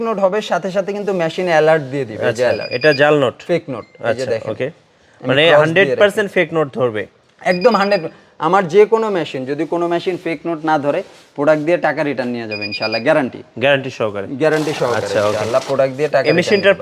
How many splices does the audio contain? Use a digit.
0